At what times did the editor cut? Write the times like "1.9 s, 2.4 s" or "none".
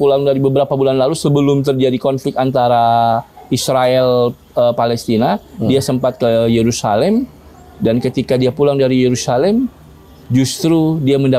none